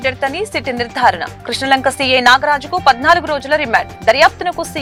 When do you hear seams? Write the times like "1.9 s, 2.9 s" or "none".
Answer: none